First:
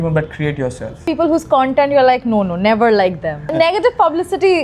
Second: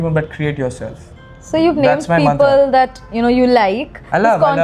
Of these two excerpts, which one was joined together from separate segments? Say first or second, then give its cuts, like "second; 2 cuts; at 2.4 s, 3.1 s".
first; 2 cuts; at 1.0 s, 3.5 s